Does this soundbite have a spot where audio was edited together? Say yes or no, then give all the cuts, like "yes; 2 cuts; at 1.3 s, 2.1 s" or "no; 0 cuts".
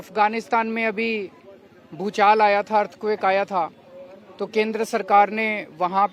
no; 0 cuts